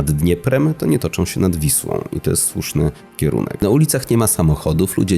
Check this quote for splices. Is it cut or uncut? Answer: cut